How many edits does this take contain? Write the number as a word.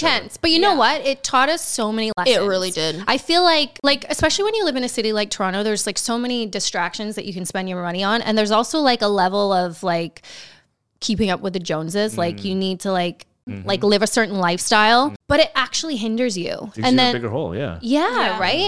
three